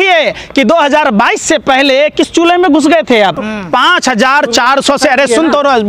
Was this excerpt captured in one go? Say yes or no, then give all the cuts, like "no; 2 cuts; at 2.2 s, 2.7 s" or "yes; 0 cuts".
no; 1 cut; at 3.5 s